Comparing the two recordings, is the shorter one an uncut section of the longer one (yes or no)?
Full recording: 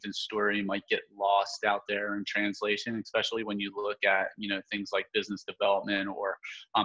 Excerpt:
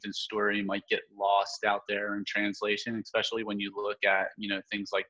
yes